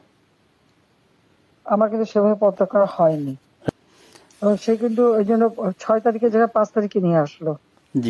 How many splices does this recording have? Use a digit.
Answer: 1